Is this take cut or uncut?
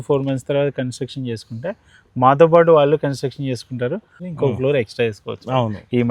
cut